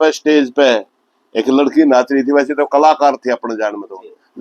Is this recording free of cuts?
yes; 0 cuts

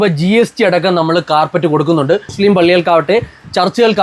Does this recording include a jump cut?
yes; 1 cut; at 2.3 s

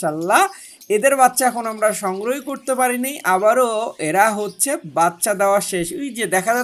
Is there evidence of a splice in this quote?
no; 0 cuts

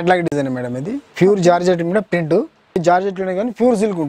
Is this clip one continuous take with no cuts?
no; 1 cut; at 2.8 s

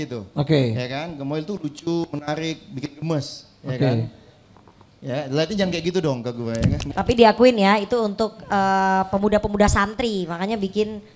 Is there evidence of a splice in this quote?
yes; 1 cut; at 6.8 s

